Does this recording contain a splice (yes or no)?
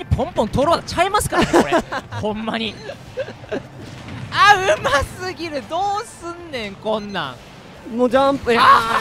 no